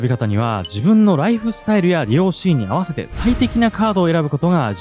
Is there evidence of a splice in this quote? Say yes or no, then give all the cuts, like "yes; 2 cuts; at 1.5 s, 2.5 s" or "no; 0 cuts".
no; 0 cuts